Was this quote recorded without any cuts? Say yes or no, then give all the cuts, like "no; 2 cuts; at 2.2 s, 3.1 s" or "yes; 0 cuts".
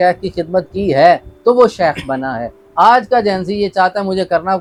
yes; 0 cuts